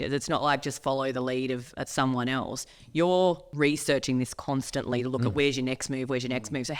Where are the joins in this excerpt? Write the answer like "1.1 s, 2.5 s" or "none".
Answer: 3.5 s